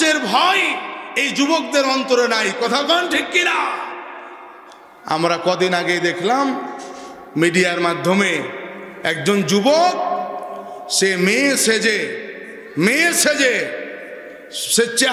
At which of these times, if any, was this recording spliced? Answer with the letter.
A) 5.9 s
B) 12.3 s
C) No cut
C